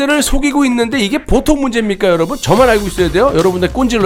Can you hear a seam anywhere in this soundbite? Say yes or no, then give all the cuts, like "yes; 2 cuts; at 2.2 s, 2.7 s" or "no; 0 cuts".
no; 0 cuts